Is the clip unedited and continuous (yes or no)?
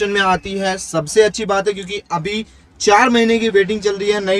yes